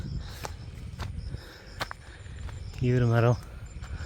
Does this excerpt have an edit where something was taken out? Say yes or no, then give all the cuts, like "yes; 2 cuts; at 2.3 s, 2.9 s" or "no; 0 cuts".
no; 0 cuts